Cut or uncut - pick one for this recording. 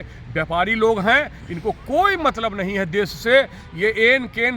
uncut